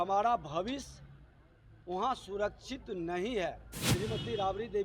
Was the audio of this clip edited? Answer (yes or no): yes